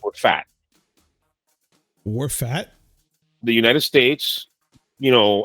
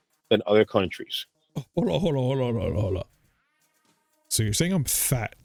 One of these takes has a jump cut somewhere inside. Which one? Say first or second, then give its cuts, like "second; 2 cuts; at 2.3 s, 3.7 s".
first; 1 cut; at 1.2 s